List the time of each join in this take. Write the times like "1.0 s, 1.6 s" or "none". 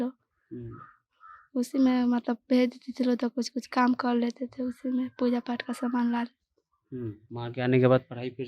7.2 s